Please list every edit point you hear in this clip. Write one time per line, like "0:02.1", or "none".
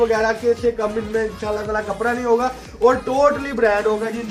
none